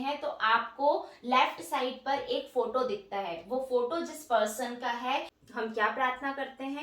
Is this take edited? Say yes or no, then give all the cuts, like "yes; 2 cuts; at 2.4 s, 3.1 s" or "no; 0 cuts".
yes; 1 cut; at 5.4 s